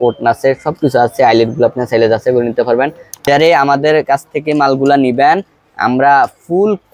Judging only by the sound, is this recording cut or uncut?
cut